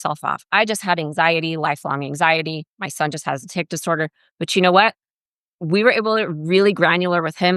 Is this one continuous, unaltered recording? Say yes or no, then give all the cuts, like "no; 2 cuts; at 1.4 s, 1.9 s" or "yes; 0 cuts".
yes; 0 cuts